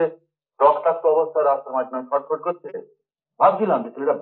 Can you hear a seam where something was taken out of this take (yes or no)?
no